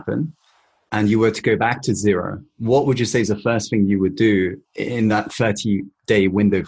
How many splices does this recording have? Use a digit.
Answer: 0